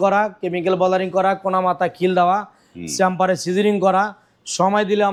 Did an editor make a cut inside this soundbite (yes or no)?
no